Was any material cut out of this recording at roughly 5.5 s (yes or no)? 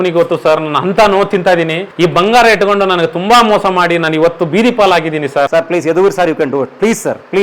yes